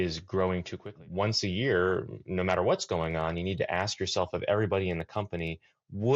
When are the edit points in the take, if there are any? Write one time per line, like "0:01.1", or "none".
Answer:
0:00.9